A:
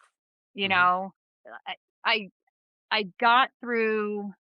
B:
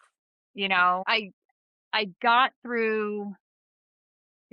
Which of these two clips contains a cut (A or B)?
B